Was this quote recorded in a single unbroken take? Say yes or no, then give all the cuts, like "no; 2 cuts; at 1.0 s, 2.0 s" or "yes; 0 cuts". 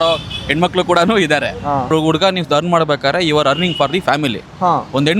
no; 1 cut; at 1.9 s